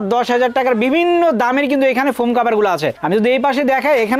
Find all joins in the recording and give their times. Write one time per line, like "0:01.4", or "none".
none